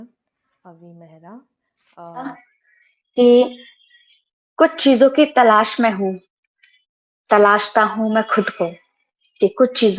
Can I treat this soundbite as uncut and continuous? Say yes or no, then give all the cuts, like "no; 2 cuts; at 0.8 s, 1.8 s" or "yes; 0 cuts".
no; 1 cut; at 2.3 s